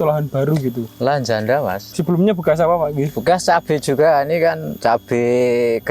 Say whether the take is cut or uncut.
cut